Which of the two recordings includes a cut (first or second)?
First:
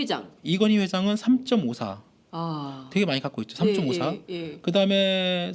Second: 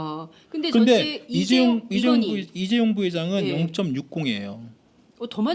second